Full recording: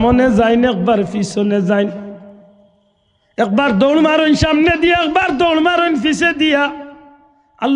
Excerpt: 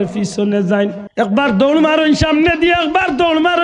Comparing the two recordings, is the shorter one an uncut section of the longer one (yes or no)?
no